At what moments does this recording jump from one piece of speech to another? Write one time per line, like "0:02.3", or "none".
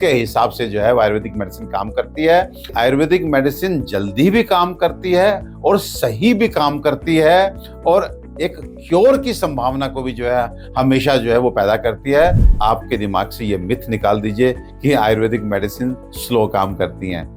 0:02.7
0:12.4